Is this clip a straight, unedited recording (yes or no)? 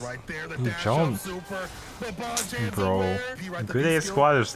no